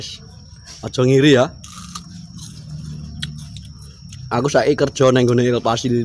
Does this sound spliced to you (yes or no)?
no